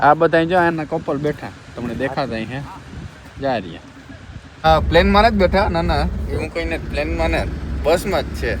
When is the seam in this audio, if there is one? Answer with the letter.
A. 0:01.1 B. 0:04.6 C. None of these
B